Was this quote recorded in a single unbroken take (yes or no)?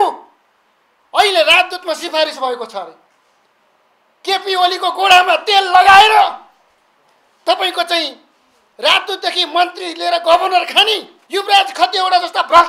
no